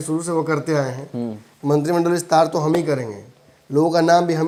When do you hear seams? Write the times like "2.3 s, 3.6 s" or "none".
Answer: none